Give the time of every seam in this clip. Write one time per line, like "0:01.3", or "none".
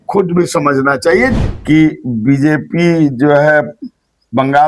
0:01.3